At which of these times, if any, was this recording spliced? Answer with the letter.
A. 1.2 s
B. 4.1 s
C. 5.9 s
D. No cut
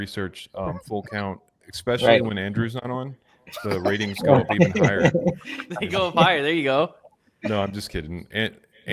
D